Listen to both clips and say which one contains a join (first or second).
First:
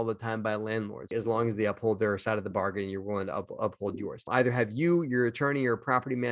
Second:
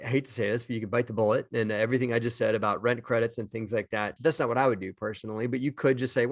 first